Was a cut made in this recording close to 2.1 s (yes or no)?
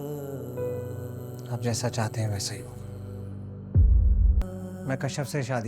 no